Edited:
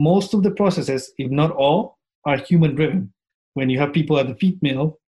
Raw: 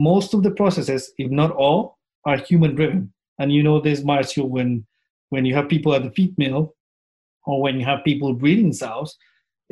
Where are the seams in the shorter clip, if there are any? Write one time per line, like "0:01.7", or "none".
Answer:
0:03.2